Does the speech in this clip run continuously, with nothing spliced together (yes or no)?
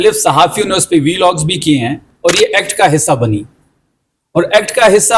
no